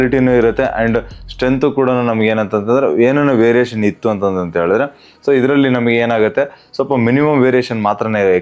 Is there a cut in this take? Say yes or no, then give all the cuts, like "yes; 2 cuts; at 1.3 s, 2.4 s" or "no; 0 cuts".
no; 0 cuts